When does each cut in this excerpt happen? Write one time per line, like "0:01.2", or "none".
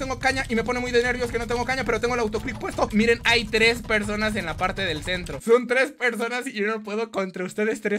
0:02.9